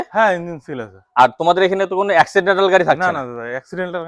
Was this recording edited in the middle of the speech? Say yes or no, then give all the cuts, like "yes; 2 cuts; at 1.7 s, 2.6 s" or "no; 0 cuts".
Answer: no; 0 cuts